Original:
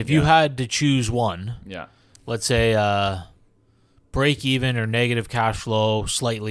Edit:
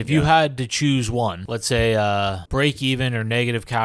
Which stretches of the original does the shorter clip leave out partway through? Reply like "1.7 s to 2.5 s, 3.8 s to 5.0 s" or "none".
1.5 s to 2.3 s, 3.2 s to 4.0 s